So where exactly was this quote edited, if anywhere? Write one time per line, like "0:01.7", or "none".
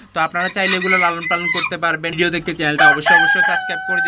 0:02.1